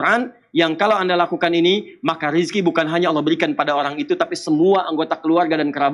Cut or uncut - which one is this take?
uncut